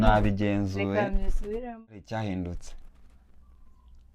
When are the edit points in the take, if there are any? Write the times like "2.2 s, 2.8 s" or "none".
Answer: 1.9 s